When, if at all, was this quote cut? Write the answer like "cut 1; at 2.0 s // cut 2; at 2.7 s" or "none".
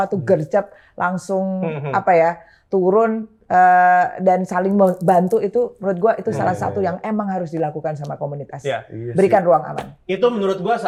none